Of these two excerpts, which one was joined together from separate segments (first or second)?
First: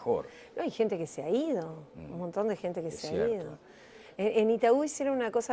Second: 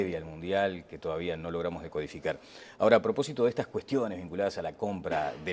first